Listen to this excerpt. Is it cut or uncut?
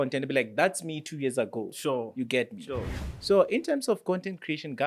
cut